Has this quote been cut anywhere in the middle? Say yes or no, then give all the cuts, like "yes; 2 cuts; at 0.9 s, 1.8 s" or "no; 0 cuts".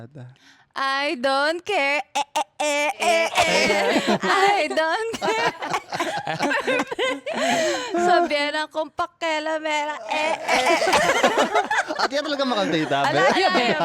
no; 0 cuts